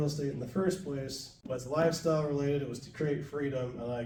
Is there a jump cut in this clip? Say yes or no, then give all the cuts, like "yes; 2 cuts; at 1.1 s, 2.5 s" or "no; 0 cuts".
no; 0 cuts